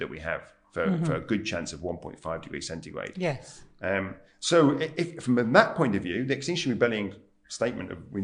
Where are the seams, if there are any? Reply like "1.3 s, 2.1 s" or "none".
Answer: none

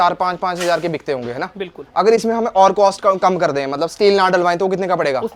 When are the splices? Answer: none

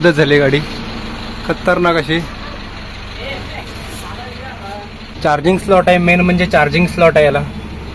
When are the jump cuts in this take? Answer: 5.0 s

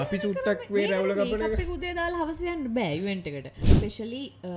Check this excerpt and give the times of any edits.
3.6 s

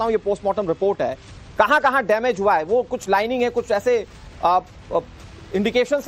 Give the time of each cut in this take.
4.2 s

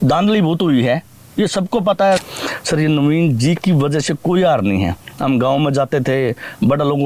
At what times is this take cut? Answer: 2.2 s

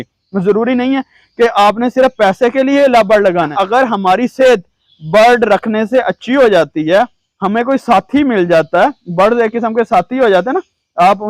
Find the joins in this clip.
3.5 s

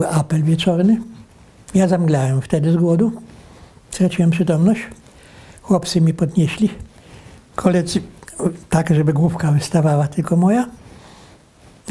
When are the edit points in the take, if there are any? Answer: none

